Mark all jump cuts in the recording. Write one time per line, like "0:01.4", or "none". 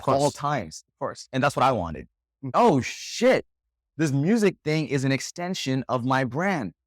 0:02.5